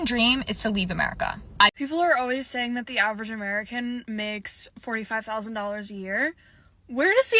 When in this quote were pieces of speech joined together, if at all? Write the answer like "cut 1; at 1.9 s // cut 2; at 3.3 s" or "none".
cut 1; at 1.7 s